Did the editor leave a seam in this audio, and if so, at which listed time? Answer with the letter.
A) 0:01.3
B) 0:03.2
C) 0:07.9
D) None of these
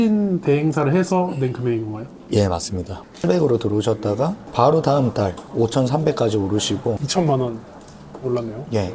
B